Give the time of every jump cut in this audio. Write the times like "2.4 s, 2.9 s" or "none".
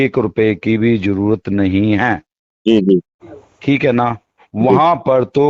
none